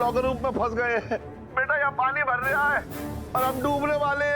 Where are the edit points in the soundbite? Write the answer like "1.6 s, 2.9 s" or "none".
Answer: 1.4 s